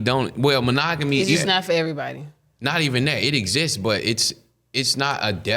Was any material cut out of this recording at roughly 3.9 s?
no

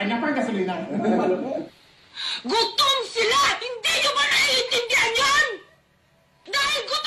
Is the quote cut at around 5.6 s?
no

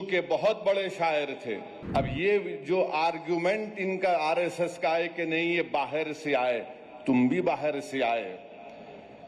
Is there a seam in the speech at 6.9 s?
no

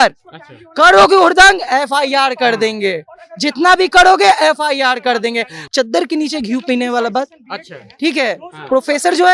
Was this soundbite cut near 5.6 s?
yes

